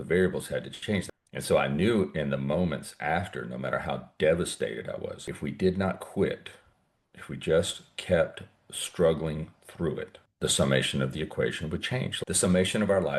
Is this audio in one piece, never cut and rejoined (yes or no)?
no